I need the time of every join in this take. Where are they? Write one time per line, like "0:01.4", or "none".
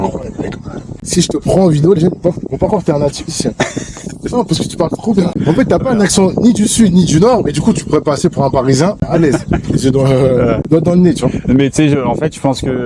0:00.9
0:05.3
0:09.0
0:10.6